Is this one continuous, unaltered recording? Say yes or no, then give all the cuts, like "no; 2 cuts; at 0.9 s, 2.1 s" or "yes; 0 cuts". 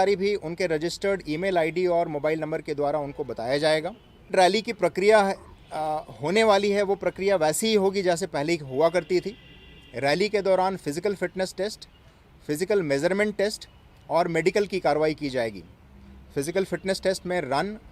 no; 1 cut; at 4.3 s